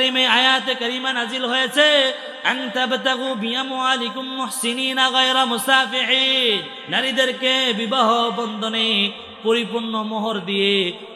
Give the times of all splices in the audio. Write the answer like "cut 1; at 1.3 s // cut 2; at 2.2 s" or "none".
cut 1; at 6.8 s